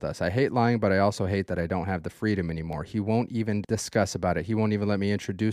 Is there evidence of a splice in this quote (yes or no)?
yes